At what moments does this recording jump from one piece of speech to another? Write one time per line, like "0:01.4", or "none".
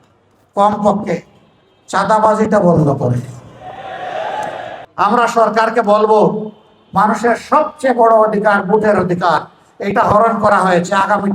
0:04.7